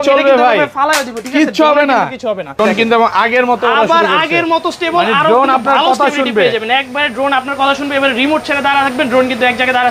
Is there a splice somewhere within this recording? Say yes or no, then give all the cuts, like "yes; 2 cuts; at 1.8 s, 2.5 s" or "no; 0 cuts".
no; 0 cuts